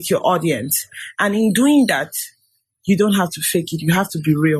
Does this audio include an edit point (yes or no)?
no